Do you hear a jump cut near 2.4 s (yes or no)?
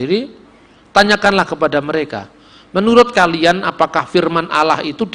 no